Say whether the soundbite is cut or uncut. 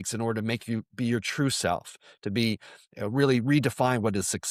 uncut